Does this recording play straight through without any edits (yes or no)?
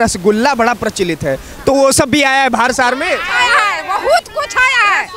yes